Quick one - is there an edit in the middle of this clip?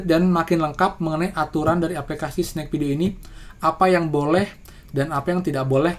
no; 0 cuts

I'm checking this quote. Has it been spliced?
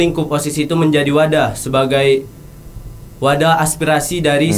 no; 0 cuts

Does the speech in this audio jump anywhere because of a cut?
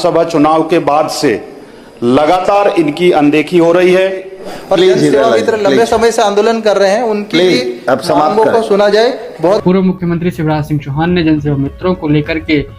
yes; 2 cuts; at 4.7 s, 9.6 s

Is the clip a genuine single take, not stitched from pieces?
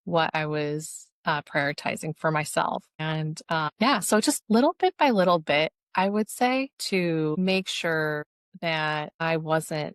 yes; 0 cuts

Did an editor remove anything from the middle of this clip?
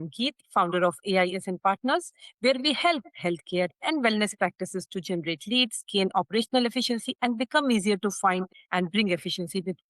yes; 1 cut; at 8.5 s

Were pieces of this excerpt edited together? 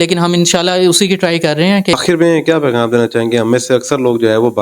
yes; 1 cut; at 1.9 s

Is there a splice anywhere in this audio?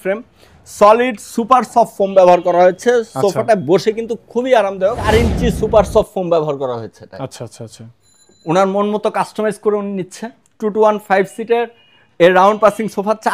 yes; 1 cut; at 5.1 s

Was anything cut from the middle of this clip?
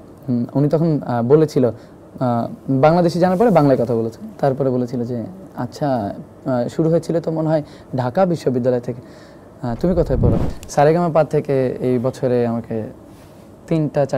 yes; 1 cut; at 10.5 s

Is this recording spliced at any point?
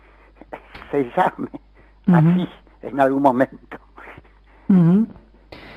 yes; 1 cut; at 3.3 s

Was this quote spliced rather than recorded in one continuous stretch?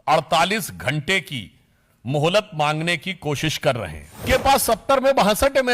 yes; 1 cut; at 4.2 s

